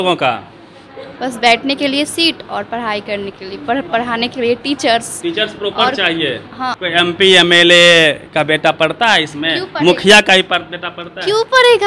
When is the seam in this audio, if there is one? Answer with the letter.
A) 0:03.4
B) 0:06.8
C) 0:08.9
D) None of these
B